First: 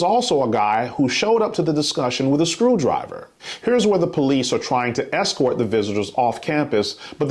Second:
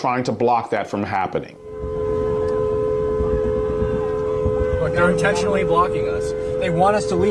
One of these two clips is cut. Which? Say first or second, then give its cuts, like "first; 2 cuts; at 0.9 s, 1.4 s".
second; 1 cut; at 1.9 s